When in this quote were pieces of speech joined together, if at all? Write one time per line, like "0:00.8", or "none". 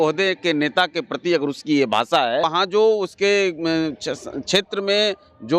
0:02.5